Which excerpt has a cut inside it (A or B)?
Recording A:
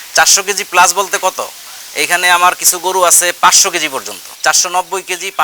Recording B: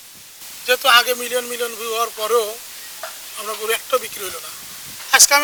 A